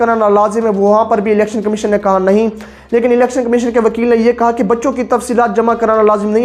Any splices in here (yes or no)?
no